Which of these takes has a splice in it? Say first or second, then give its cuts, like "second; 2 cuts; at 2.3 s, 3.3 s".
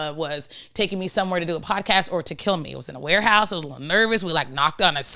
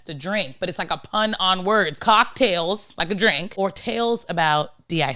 second; 2 cuts; at 1.9 s, 3.5 s